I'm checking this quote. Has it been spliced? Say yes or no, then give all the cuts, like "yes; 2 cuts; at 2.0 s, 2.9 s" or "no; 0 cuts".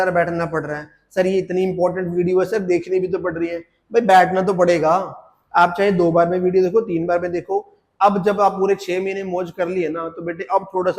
no; 0 cuts